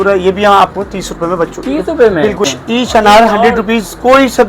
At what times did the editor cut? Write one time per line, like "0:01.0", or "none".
0:02.5